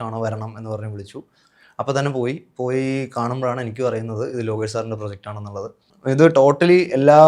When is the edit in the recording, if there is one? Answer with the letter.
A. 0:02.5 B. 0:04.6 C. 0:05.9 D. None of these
C